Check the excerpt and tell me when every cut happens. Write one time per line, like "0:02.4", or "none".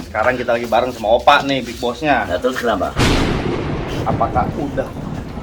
0:02.9
0:04.1